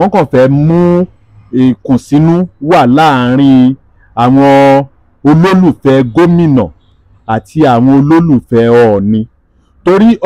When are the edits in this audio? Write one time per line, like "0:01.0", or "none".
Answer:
none